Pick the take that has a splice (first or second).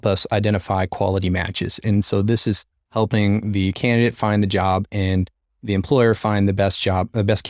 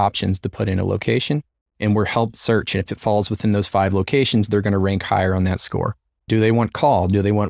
second